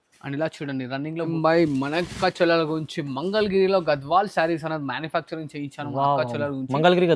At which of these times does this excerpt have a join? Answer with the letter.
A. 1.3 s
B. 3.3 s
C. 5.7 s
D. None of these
A